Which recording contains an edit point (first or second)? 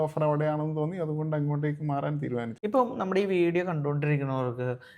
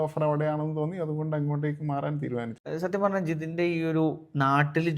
first